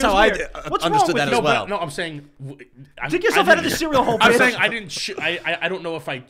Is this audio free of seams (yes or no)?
yes